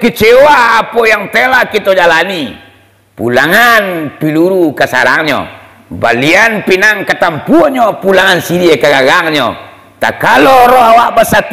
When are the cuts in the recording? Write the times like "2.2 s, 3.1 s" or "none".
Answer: none